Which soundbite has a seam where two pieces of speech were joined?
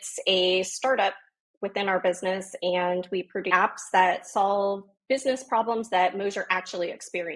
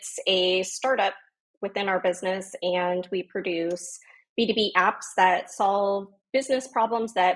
first; 1 cut; at 3.5 s

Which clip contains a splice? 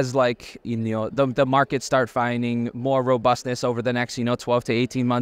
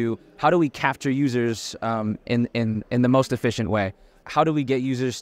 second; 1 cut; at 4.2 s

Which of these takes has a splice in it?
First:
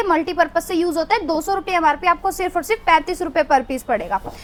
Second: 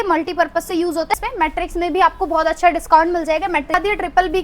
second; 2 cuts; at 1.2 s, 3.7 s

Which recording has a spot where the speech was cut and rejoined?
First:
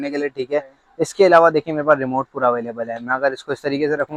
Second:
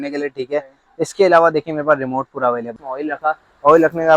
second; 1 cut; at 2.7 s

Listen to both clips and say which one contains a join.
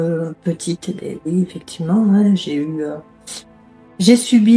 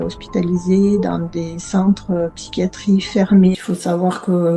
second; 1 cut; at 3.5 s

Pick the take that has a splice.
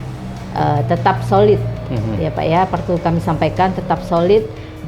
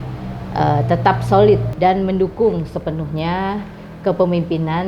second; 1 cut; at 1.7 s

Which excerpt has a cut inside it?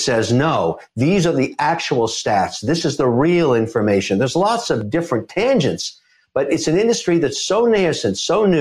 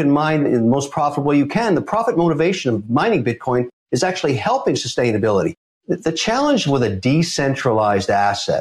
second; 1 cut; at 5.7 s

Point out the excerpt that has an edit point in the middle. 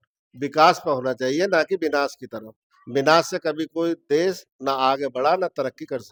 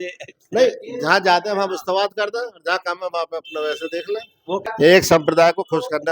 second; 1 cut; at 4.7 s

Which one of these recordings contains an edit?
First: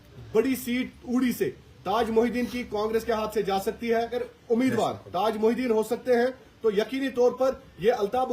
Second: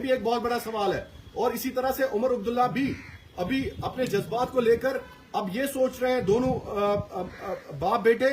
first; 1 cut; at 4.3 s

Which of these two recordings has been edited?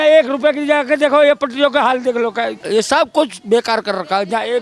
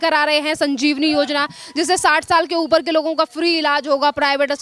first; 1 cut; at 2.6 s

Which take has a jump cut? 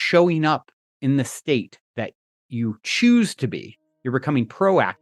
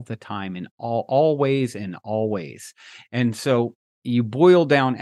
second; 1 cut; at 3.8 s

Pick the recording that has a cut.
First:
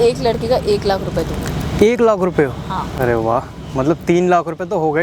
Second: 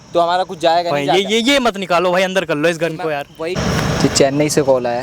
second; 1 cut; at 3.6 s

